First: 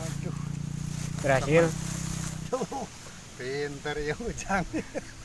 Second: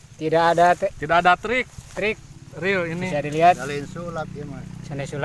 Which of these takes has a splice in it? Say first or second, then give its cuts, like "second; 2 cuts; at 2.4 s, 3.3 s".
first; 1 cut; at 2.5 s